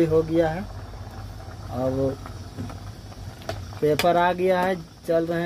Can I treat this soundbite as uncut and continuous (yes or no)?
yes